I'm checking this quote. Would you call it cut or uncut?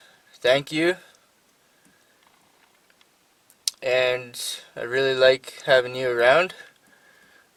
uncut